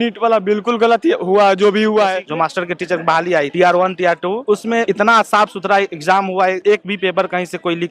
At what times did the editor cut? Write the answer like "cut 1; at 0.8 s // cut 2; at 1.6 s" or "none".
cut 1; at 2.2 s